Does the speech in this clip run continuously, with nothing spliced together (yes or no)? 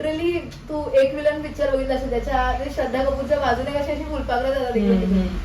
yes